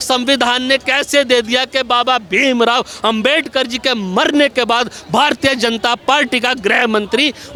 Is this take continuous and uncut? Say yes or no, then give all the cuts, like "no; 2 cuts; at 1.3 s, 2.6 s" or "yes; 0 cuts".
yes; 0 cuts